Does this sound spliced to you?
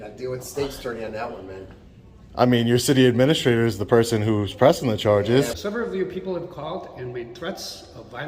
yes; 1 cut; at 5.6 s

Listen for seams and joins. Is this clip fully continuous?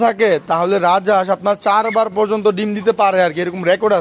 yes; 0 cuts

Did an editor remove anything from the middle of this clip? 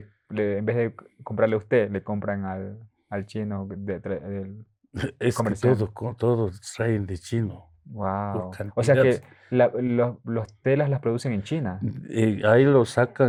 no; 0 cuts

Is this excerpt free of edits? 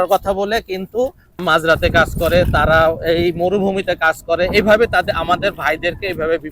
no; 1 cut; at 1.4 s

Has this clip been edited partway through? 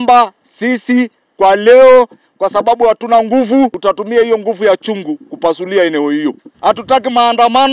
yes; 2 cuts; at 3.8 s, 6.4 s

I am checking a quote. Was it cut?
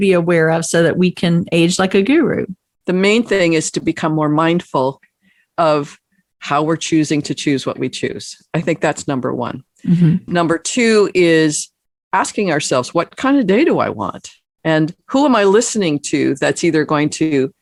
no; 0 cuts

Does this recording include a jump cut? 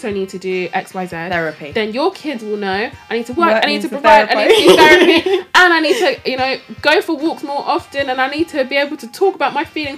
no; 0 cuts

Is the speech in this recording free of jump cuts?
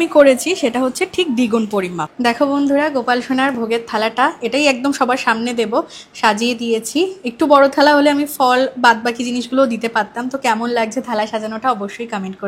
no; 1 cut; at 2.0 s

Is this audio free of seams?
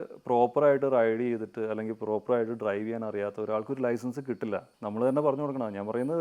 no; 1 cut; at 4.7 s

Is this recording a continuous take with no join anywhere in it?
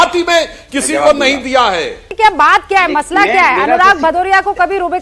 no; 1 cut; at 2.0 s

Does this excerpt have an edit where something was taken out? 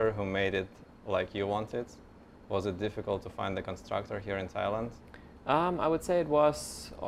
no; 0 cuts

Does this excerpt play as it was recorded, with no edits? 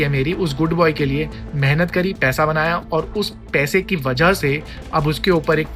yes; 0 cuts

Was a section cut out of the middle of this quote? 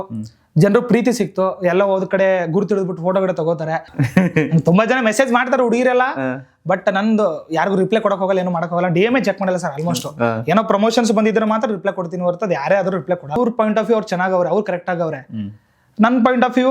yes; 2 cuts; at 3.9 s, 13.4 s

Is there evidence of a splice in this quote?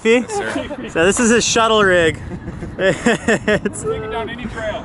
no; 0 cuts

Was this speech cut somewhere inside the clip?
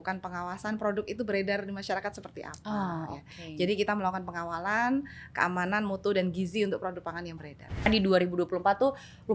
yes; 1 cut; at 7.9 s

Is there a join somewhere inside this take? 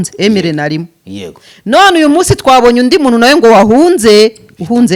no; 0 cuts

